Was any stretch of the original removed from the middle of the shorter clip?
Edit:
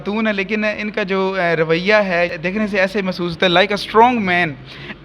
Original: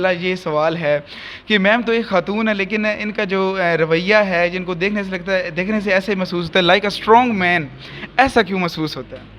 yes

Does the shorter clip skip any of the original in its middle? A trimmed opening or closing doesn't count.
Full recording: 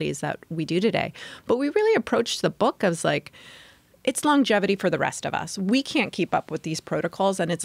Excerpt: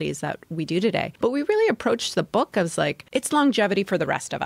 yes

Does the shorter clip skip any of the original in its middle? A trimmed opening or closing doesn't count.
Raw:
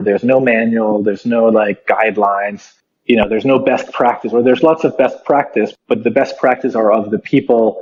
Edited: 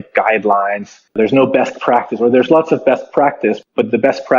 yes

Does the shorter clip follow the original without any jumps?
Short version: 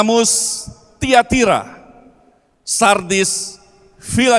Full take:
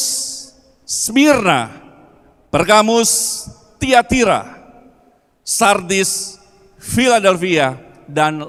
yes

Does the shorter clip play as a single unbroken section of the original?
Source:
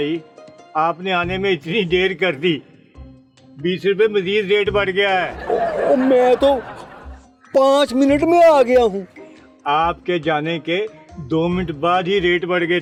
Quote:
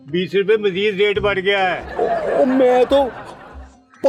yes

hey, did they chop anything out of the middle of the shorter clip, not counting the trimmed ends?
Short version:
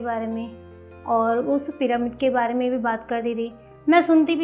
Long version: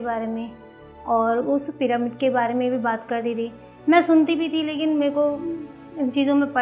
no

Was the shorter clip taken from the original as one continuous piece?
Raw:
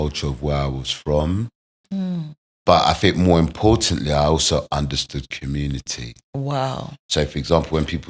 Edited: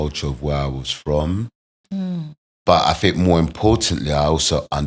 yes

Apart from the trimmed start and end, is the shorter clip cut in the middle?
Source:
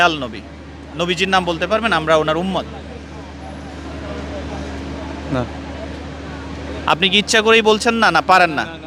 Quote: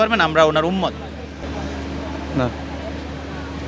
yes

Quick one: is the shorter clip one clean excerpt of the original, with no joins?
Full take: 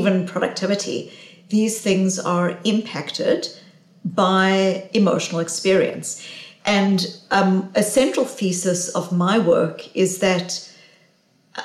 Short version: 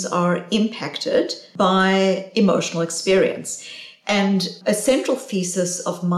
no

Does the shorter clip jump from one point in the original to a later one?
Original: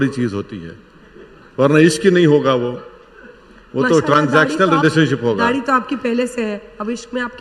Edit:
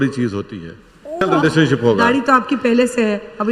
yes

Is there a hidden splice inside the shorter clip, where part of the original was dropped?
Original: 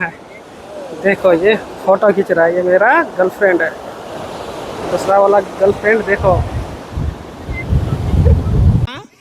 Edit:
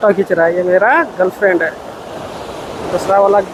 no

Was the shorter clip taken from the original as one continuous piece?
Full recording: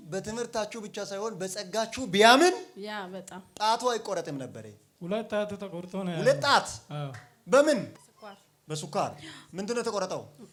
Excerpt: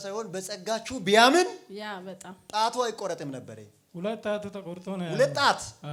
yes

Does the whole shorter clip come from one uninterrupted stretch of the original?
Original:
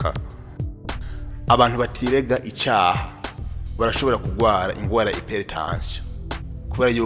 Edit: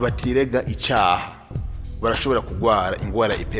yes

